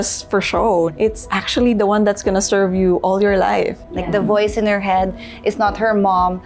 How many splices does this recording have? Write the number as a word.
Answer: two